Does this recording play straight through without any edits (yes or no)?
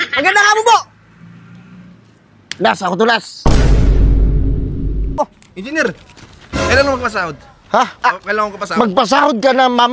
no